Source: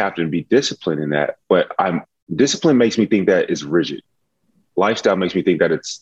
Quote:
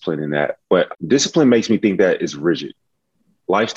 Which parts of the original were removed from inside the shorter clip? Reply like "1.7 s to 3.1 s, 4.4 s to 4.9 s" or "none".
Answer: 1.7 s to 2.2 s